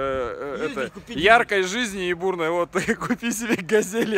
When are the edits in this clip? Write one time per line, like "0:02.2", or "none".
none

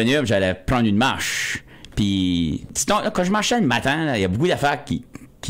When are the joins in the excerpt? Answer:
0:02.7

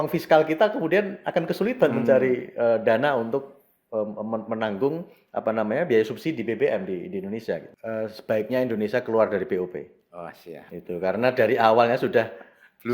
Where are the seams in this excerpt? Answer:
0:07.7

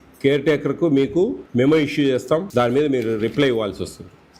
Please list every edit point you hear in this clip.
0:01.4
0:02.5

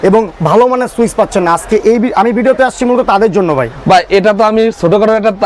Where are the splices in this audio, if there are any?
none

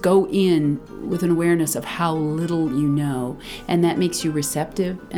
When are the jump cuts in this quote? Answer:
0:00.9

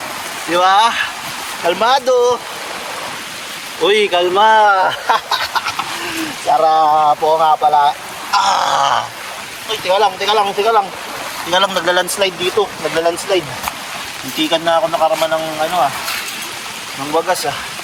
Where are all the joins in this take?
none

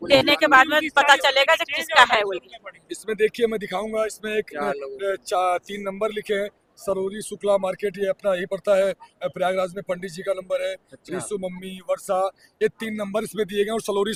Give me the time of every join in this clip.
none

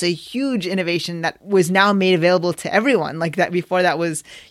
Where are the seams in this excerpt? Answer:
0:01.4

